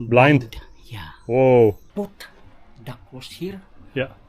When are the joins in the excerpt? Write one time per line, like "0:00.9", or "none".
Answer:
0:01.8